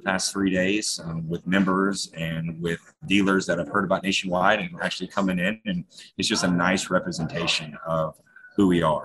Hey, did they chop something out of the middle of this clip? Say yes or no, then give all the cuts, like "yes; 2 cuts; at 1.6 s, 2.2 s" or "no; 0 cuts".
no; 0 cuts